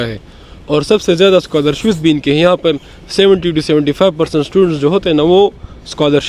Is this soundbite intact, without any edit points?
yes; 0 cuts

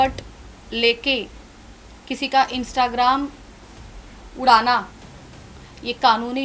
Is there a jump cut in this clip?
no; 0 cuts

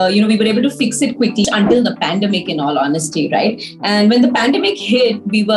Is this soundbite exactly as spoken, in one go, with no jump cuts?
no; 1 cut; at 1.4 s

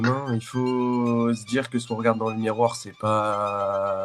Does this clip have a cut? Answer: no; 0 cuts

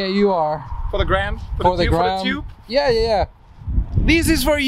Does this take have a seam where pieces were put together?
no; 0 cuts

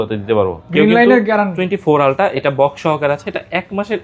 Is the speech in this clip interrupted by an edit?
yes; 1 cut; at 1.6 s

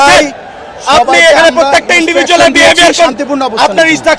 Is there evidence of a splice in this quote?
no; 0 cuts

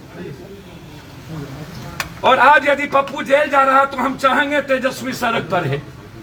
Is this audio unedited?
yes; 0 cuts

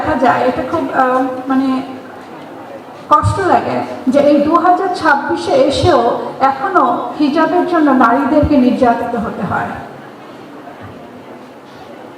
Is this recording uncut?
yes; 0 cuts

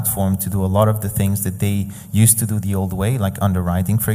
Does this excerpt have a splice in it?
no; 0 cuts

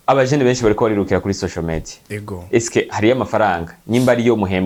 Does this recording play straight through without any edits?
yes; 0 cuts

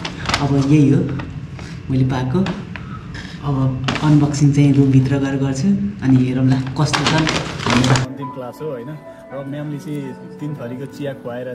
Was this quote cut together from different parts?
yes; 1 cut; at 8.1 s

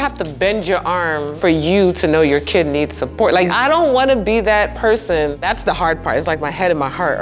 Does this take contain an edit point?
yes; 3 cuts; at 1.3 s, 3.5 s, 5.4 s

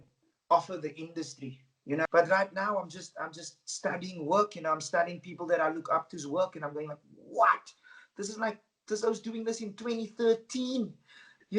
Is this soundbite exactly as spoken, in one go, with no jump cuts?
no; 1 cut; at 2.1 s

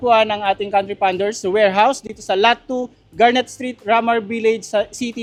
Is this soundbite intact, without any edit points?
yes; 0 cuts

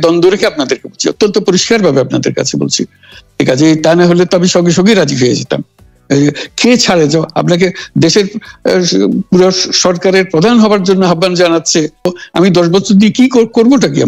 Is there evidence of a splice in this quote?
yes; 1 cut; at 12.1 s

